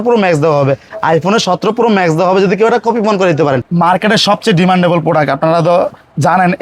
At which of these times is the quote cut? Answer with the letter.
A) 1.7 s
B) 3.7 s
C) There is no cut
B